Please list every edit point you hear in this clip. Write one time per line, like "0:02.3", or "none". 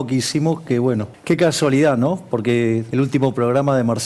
0:01.1
0:02.9

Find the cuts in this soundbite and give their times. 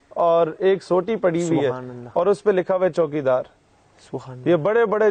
none

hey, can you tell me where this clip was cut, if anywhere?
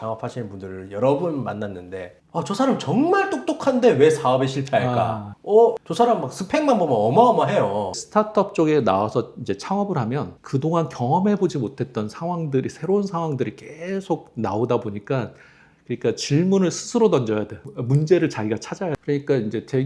0:08.0
0:19.0

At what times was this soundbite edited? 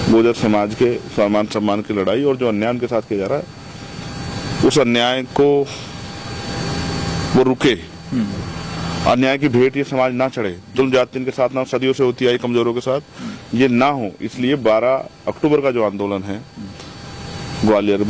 none

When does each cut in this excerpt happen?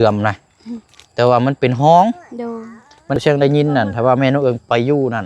0:03.2

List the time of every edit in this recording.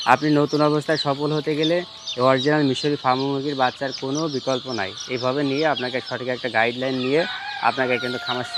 none

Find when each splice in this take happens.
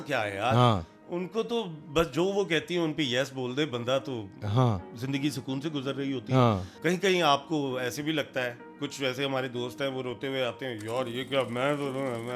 0:06.7

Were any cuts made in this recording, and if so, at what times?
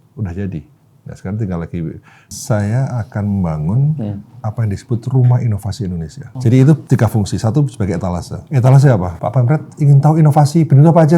0:02.3
0:06.2
0:06.8
0:08.4
0:09.1

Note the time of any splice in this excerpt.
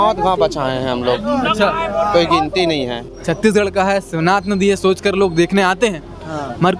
0:03.1

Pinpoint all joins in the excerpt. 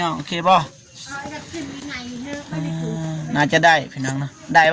none

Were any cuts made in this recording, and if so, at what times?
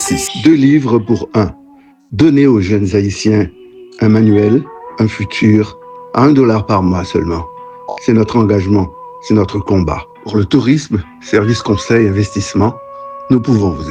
none

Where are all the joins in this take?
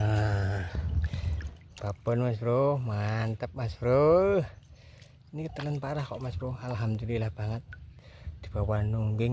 none

